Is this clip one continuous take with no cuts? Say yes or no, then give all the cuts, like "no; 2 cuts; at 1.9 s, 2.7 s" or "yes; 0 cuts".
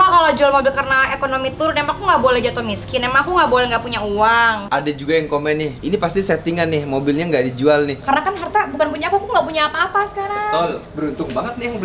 no; 2 cuts; at 4.6 s, 7.9 s